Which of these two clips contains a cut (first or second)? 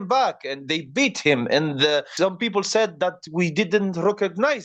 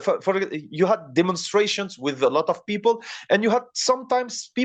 first